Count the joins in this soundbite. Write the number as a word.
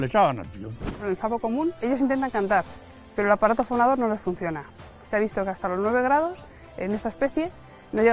two